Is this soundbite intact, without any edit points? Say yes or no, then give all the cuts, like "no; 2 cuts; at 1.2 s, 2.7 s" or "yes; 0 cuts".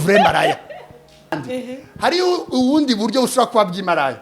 no; 1 cut; at 1.4 s